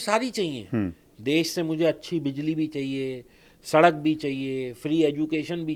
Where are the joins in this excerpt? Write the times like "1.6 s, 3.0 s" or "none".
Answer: none